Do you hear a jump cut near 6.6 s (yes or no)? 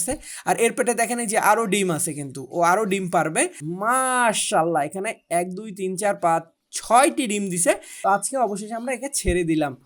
no